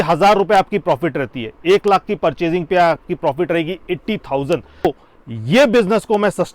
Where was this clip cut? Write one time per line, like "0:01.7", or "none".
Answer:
0:04.8